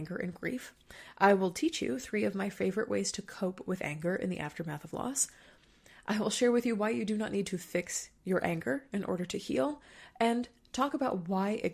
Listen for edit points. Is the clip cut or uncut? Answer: uncut